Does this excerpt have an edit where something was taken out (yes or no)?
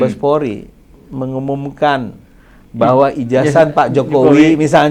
no